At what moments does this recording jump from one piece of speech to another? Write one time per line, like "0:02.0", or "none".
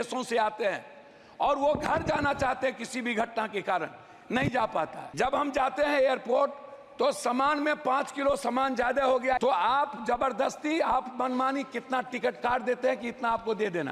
0:05.0
0:09.4

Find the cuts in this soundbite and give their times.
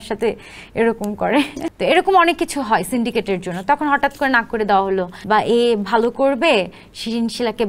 0:01.6
0:05.1

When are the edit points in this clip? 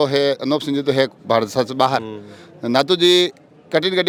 none

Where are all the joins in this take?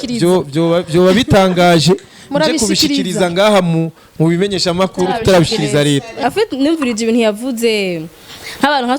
0:06.2

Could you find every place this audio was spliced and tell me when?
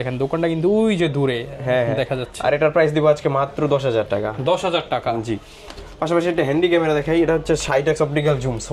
none

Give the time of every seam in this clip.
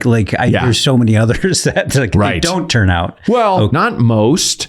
0:03.7

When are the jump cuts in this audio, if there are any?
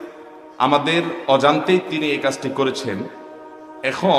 none

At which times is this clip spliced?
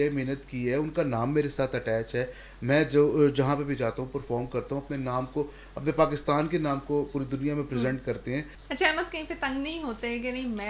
0:08.6

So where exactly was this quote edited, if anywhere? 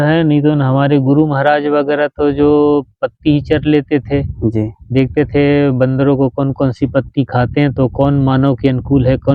none

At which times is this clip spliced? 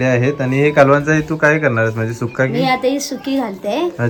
none

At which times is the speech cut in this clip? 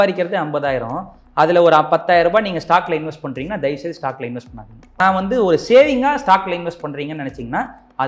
0:05.0

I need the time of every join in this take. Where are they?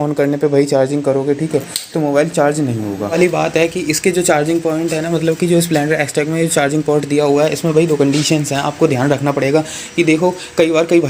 none

